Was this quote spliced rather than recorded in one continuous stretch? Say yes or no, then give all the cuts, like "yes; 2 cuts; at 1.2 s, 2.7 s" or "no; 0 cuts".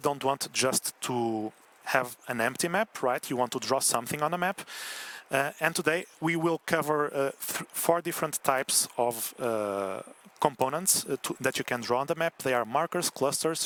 no; 0 cuts